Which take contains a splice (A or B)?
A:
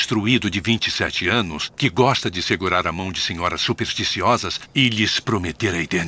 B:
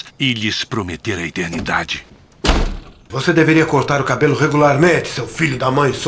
B